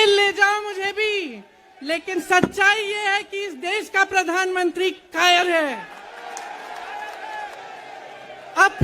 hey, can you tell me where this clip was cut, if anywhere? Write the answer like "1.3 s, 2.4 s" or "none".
7.6 s